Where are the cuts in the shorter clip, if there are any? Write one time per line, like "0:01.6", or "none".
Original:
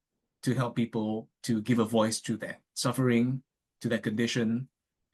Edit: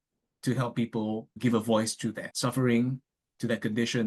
0:01.4
0:02.3